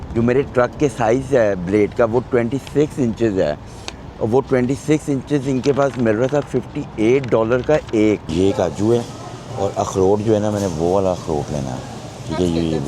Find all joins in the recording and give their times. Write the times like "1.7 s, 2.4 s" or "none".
8.3 s

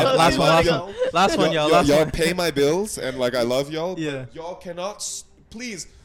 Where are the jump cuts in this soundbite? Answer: none

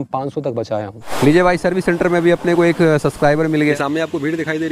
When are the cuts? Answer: 1.1 s, 3.7 s

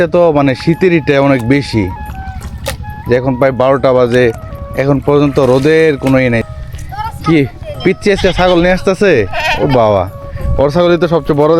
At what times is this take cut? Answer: 6.4 s

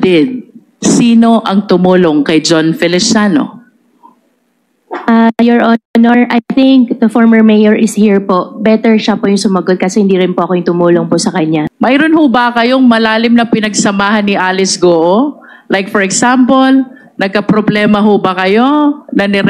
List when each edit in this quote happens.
11.7 s

